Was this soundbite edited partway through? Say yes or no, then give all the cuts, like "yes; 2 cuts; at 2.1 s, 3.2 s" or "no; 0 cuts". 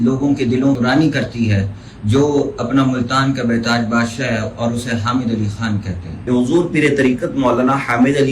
yes; 1 cut; at 6.1 s